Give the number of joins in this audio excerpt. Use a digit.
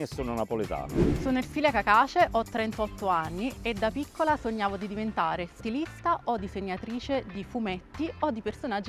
1